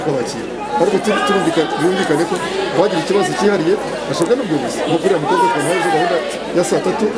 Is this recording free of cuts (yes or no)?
yes